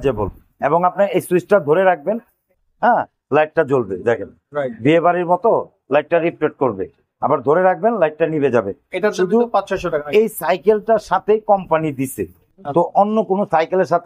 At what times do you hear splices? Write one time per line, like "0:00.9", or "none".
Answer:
none